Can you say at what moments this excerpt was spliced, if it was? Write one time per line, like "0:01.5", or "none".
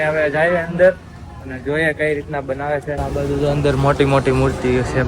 0:03.0

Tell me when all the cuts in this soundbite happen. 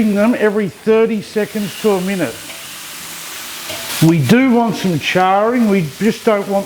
none

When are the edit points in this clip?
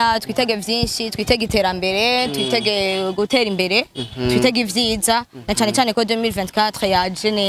none

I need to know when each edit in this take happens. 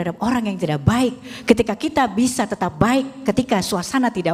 none

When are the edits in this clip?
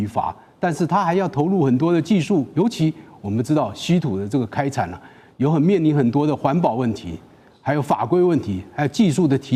none

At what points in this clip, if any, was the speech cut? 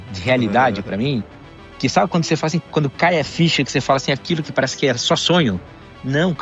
none

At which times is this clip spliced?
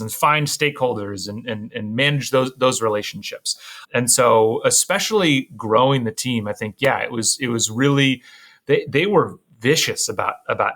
0:03.7

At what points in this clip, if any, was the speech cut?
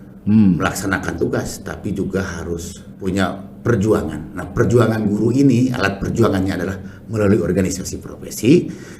0:03.0

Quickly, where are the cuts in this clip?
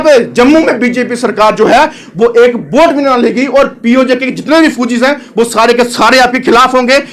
none

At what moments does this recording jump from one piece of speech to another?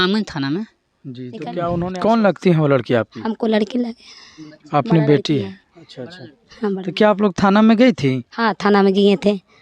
0:01.6

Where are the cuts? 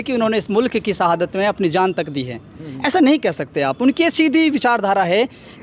none

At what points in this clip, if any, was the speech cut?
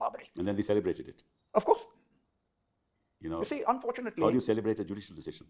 none

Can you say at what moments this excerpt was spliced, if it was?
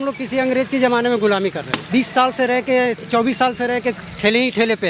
0:01.7

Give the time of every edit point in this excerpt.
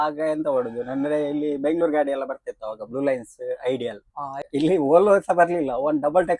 0:04.4

